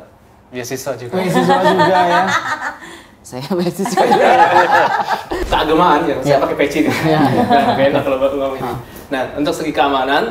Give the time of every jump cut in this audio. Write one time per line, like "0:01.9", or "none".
0:05.3